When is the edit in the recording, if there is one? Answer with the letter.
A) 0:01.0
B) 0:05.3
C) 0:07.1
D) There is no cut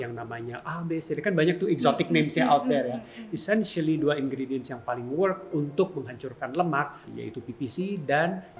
C